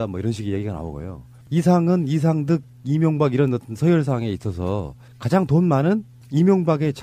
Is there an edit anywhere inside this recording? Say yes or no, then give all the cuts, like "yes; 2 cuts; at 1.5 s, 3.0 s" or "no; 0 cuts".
no; 0 cuts